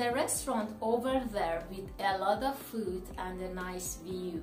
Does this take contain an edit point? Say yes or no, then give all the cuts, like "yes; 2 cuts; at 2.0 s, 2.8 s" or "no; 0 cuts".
no; 0 cuts